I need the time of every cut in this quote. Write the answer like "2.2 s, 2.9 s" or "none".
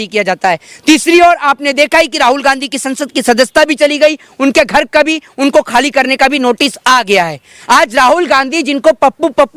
7.5 s

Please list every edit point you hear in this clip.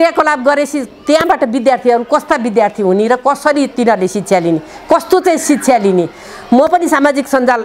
none

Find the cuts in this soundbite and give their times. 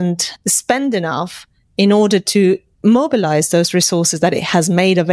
none

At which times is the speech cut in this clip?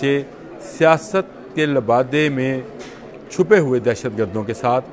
none

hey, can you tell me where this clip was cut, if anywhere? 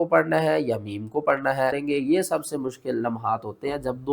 1.8 s

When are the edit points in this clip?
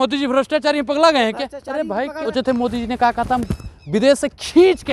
2.3 s

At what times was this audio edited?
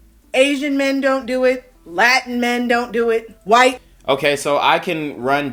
none

